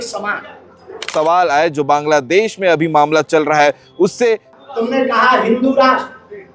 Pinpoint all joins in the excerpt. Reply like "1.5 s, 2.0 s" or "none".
1.1 s, 4.5 s